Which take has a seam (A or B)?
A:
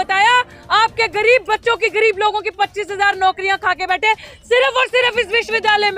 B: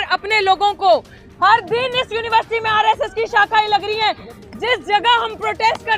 B